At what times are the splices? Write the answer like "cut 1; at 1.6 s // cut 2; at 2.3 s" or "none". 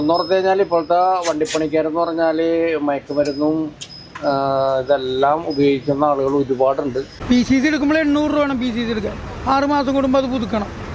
cut 1; at 7.1 s